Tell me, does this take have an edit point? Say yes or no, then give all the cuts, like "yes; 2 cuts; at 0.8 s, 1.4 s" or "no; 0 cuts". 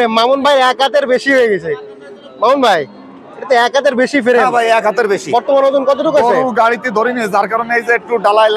no; 0 cuts